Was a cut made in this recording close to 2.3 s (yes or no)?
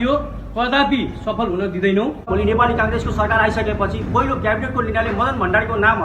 yes